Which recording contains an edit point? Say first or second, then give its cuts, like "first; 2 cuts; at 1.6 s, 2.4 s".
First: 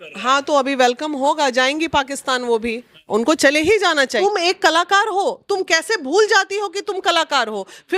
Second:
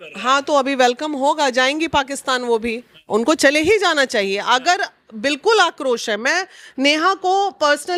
first; 1 cut; at 4.2 s